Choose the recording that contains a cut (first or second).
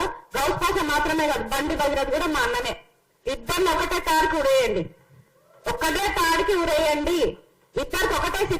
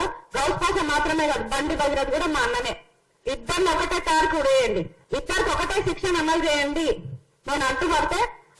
second